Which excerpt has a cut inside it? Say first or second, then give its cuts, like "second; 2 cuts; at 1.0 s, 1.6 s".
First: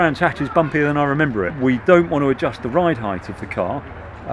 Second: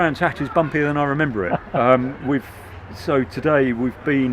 first; 1 cut; at 1.5 s